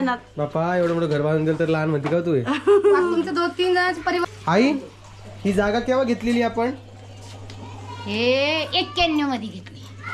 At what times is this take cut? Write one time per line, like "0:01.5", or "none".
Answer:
0:04.2